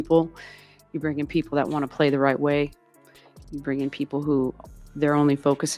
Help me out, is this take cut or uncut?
uncut